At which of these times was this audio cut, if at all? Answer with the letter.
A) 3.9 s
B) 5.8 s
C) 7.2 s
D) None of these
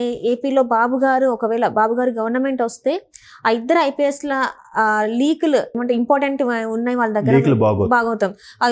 B